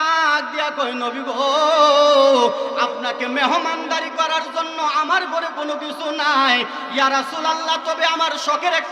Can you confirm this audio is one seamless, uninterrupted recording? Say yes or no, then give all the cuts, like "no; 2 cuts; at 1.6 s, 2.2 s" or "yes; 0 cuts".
yes; 0 cuts